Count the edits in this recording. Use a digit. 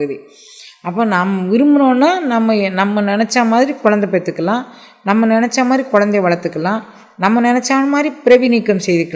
0